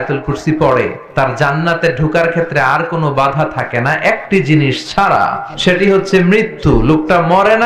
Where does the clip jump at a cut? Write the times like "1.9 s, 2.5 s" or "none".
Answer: 1.0 s, 5.5 s